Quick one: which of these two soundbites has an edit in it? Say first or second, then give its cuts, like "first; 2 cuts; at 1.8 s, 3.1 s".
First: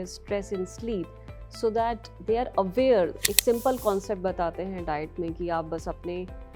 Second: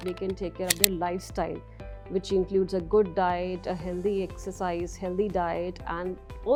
first; 1 cut; at 3.2 s